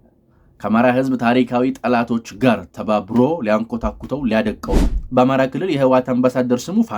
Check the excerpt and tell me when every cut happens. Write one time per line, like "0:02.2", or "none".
0:04.8